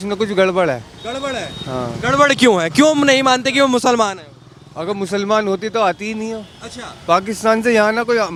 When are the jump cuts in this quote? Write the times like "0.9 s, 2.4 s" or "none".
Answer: none